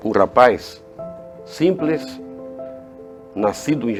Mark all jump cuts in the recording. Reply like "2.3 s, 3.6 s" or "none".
none